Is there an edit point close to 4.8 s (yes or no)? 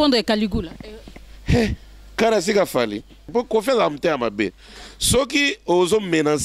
no